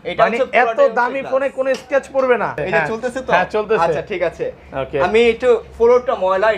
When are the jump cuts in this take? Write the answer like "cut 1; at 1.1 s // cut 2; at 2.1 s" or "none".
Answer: cut 1; at 2.6 s